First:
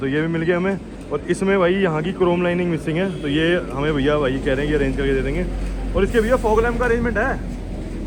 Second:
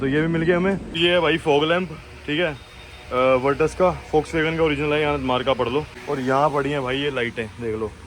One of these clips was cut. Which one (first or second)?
second